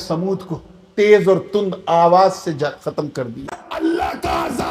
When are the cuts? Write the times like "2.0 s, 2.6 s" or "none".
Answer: 3.6 s